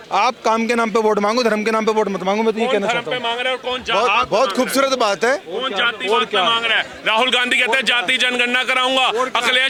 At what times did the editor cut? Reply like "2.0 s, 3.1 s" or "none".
none

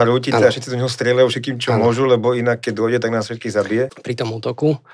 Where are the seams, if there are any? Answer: 3.9 s

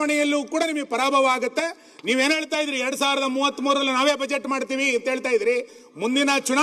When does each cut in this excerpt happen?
none

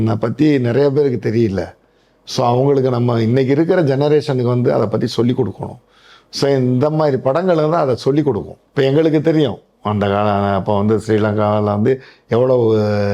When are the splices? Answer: 8.6 s

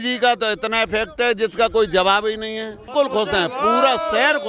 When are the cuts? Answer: 2.9 s

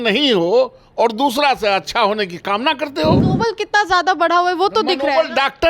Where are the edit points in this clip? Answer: 3.2 s

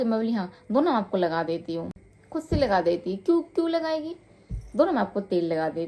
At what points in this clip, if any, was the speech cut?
none

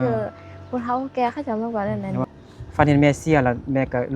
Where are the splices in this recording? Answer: 2.3 s

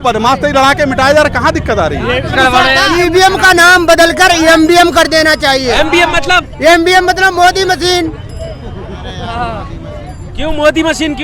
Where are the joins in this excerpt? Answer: 2.3 s

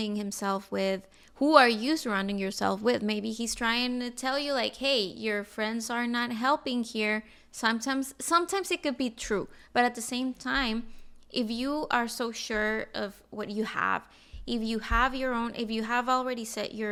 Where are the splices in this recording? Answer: none

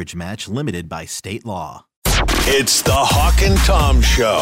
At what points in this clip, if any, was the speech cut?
1.9 s

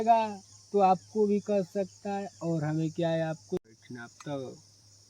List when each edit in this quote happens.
3.7 s

